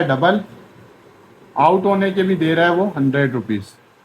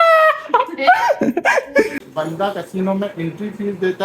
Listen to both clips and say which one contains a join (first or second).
second